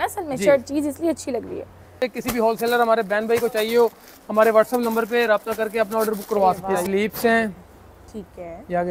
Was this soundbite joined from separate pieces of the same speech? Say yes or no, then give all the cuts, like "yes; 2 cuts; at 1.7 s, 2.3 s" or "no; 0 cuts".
yes; 2 cuts; at 2.0 s, 6.6 s